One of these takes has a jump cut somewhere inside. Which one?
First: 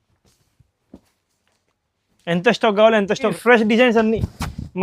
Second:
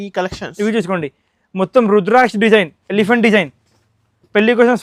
first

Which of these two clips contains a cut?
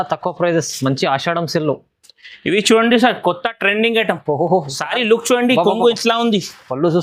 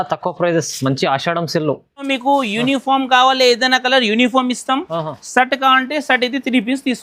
second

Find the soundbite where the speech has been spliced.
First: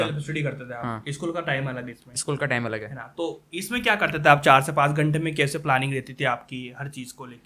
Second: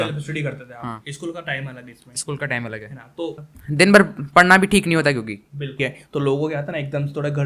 second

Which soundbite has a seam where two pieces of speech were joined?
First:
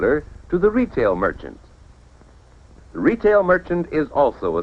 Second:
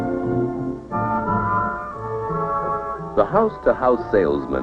first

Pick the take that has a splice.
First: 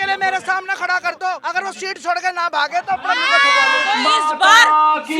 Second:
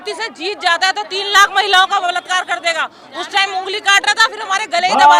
first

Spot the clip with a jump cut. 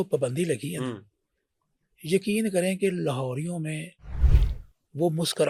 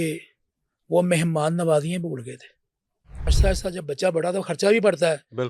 second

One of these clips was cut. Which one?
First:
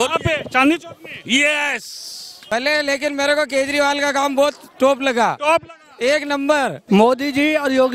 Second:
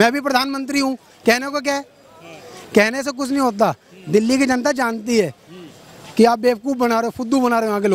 first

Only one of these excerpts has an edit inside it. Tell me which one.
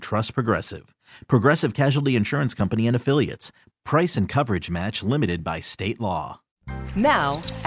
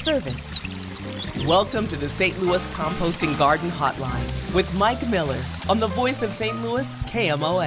first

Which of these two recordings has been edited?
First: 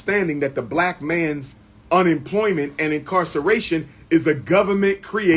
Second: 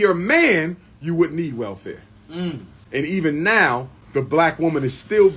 second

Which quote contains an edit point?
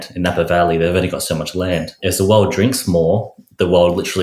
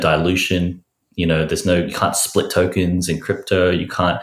first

